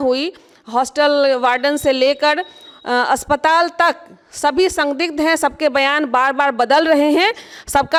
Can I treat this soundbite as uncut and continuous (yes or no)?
yes